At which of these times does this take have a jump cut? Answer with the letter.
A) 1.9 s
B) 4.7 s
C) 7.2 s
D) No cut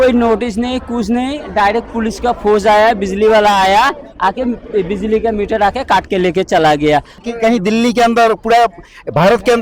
C